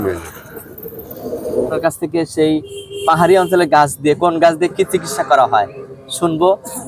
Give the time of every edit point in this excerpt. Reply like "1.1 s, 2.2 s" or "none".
1.8 s